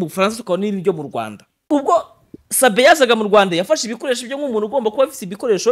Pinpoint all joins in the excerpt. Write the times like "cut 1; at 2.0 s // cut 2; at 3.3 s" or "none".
cut 1; at 1.6 s